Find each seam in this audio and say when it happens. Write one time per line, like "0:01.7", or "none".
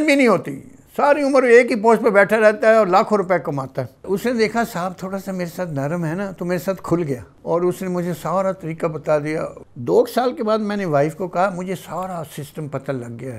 0:04.0
0:07.3
0:09.6